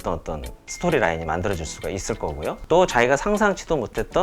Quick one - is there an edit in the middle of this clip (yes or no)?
yes